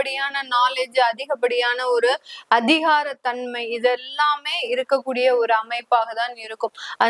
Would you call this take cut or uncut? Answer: uncut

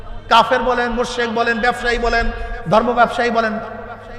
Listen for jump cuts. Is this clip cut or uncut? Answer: uncut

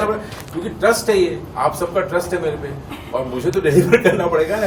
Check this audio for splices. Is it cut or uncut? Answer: uncut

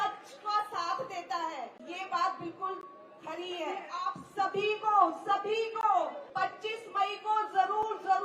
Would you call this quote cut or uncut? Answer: cut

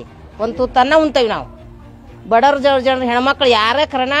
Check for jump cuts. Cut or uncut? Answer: uncut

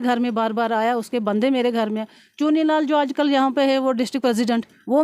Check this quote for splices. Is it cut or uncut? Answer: uncut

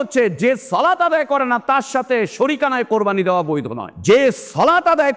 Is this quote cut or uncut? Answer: cut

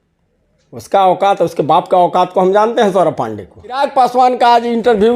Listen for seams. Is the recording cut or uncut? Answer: cut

